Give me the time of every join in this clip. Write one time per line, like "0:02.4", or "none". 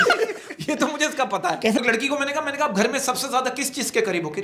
0:01.8